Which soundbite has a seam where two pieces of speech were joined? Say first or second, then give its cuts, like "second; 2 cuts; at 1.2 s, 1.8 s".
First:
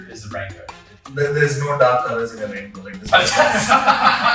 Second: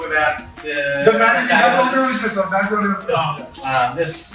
first; 1 cut; at 0.9 s